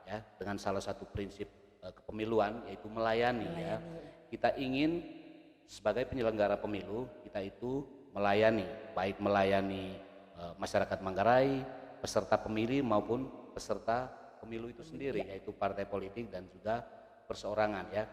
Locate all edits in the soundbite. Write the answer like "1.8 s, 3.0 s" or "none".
none